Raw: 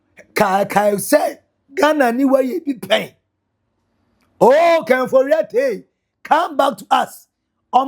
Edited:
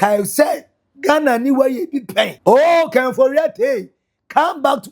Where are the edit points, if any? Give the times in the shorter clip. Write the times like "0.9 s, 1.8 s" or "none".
2.3 s